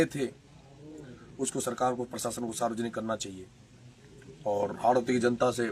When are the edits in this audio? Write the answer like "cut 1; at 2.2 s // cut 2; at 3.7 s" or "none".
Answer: none